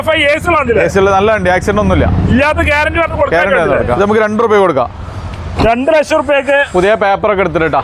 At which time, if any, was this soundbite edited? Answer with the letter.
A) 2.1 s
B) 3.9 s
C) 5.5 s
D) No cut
B